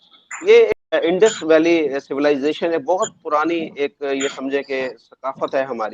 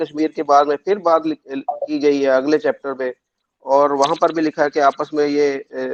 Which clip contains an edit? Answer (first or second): first